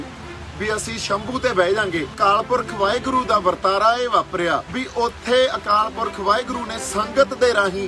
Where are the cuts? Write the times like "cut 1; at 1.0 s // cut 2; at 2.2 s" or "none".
cut 1; at 2.1 s // cut 2; at 4.7 s